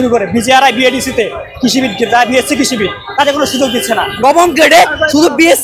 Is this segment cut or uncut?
cut